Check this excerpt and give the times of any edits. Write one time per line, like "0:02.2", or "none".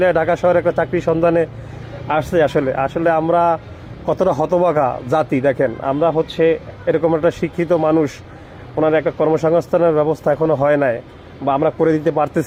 none